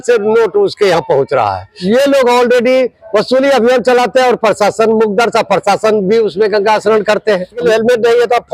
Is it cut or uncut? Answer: cut